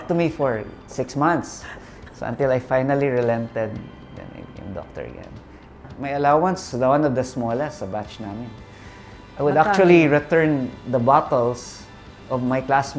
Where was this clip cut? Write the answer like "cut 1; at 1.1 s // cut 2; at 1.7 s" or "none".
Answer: cut 1; at 5.8 s